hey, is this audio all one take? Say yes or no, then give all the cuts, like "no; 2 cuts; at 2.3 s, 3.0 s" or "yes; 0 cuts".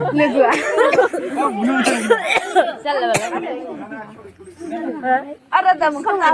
yes; 0 cuts